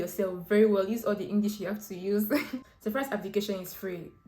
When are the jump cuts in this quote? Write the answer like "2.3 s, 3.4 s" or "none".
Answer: 2.7 s